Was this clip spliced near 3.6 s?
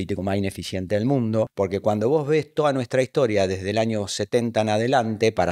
no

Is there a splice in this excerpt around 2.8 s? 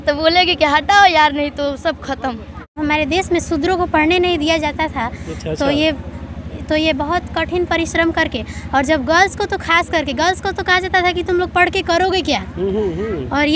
yes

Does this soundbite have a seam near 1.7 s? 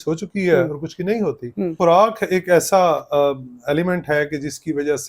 yes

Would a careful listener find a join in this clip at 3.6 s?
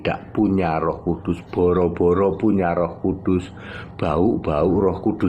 no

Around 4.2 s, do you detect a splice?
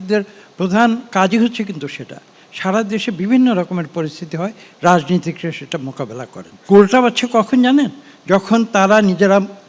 no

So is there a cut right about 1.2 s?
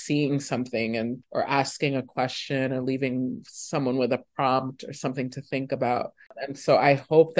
yes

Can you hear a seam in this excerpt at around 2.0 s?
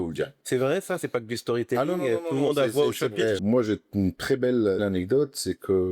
no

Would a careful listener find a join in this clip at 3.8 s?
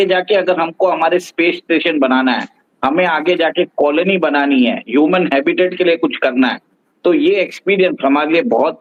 no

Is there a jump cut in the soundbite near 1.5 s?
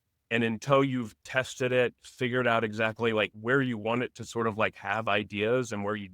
no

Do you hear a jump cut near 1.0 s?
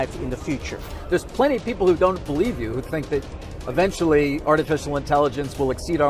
yes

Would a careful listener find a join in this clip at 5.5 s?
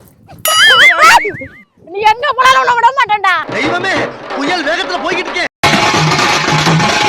yes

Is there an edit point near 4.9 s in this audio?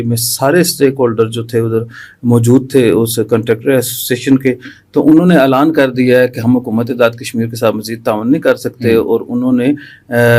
no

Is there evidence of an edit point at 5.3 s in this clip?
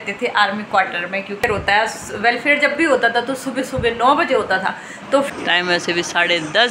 yes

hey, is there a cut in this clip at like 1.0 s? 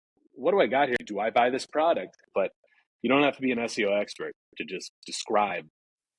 yes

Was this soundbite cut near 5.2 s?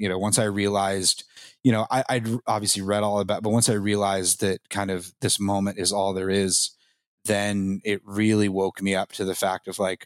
no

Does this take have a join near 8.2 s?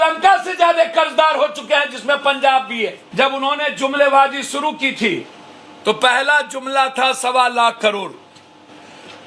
no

